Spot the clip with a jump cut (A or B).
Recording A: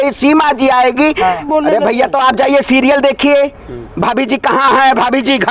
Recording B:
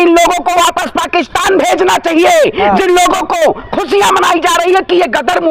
A